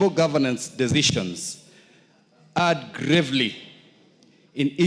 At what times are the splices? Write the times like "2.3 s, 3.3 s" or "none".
none